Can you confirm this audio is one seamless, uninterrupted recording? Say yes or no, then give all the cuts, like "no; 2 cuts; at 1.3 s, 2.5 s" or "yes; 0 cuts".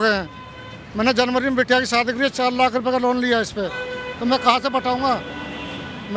yes; 0 cuts